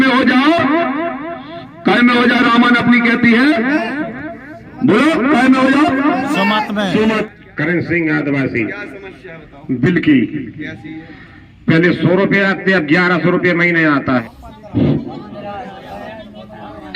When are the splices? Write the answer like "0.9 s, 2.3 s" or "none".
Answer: 7.2 s, 14.2 s